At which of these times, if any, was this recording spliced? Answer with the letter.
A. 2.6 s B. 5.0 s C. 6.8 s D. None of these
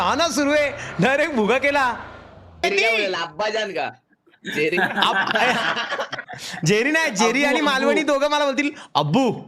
A